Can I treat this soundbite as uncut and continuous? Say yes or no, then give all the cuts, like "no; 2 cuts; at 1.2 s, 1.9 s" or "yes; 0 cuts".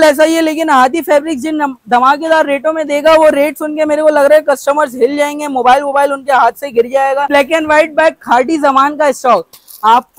no; 1 cut; at 7.3 s